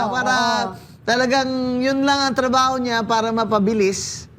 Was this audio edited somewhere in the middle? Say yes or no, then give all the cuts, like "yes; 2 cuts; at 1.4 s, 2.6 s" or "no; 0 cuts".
no; 0 cuts